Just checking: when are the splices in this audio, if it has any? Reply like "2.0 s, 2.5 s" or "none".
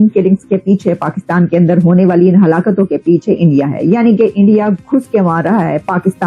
none

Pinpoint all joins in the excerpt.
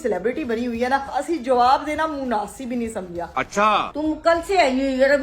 1.2 s, 3.8 s

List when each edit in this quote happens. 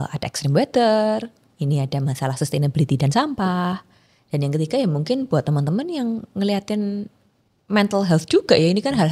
none

